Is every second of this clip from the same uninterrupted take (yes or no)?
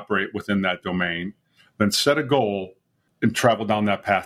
yes